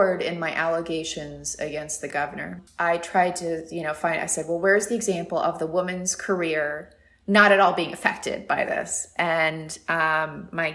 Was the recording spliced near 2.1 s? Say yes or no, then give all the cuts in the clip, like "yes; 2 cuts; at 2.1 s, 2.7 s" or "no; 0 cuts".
yes; 1 cut; at 2.1 s